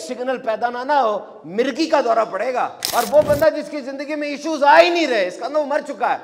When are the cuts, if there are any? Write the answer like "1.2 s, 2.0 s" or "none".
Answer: 2.8 s